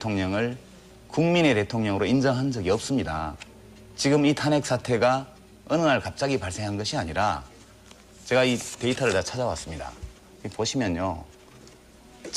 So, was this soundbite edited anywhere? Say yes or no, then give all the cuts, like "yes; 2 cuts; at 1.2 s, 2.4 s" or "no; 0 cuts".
yes; 1 cut; at 4.2 s